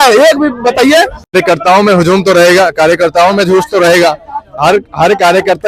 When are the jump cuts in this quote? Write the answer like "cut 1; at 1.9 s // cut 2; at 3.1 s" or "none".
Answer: cut 1; at 1.2 s